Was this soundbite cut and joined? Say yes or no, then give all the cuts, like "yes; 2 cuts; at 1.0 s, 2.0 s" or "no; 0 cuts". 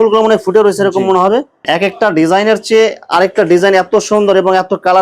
yes; 1 cut; at 1.6 s